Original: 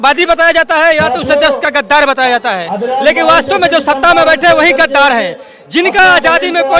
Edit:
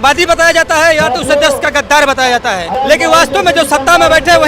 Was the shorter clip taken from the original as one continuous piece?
no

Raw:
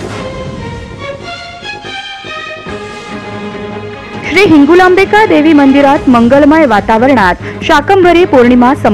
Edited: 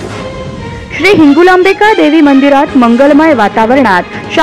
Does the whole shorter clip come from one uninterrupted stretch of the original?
no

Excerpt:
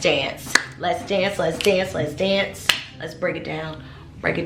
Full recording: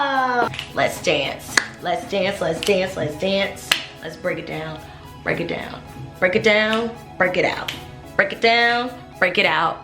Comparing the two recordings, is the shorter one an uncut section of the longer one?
yes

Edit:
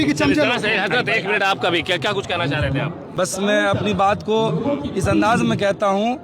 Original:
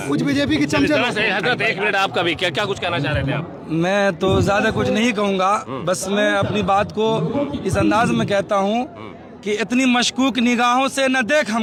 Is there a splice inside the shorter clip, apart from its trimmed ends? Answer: yes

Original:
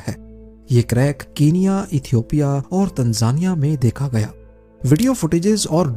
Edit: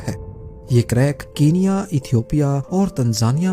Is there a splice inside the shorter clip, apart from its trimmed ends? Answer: no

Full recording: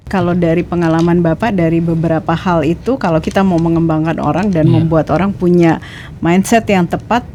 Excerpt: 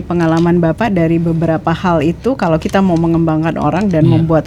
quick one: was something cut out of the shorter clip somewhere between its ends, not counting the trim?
no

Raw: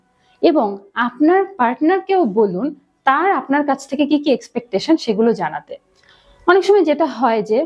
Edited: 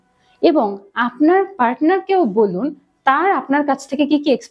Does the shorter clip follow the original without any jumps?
yes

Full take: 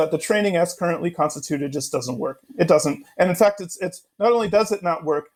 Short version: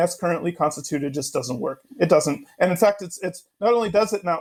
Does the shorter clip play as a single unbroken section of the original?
yes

